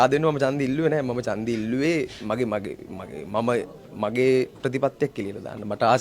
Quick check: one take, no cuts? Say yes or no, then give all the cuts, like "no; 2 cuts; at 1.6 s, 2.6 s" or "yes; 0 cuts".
yes; 0 cuts